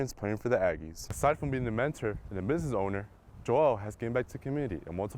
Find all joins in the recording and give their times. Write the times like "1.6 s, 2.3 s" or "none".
1.1 s